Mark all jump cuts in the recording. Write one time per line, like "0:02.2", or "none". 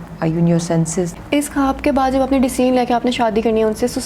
0:01.2